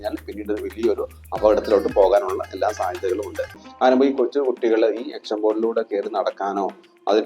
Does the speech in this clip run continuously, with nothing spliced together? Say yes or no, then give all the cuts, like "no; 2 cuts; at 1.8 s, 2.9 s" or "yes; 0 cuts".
no; 1 cut; at 3.6 s